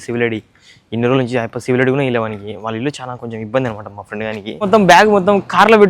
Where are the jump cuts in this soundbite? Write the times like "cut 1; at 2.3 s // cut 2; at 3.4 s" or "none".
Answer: cut 1; at 4.6 s